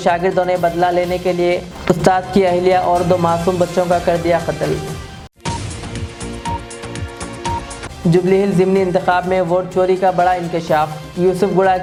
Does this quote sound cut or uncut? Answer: uncut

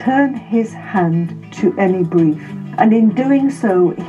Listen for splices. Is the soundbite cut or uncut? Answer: cut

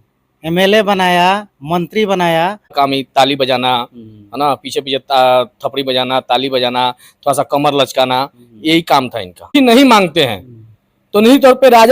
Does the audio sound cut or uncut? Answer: cut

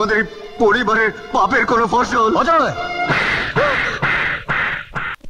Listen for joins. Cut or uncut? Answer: uncut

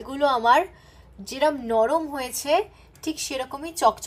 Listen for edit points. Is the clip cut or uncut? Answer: uncut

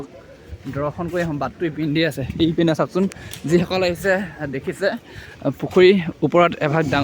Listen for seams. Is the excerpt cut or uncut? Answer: uncut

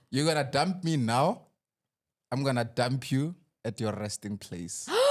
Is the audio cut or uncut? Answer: uncut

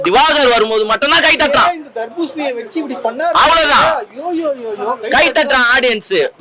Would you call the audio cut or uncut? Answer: uncut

